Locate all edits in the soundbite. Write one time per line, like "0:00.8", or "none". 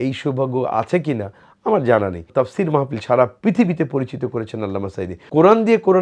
0:02.3
0:05.2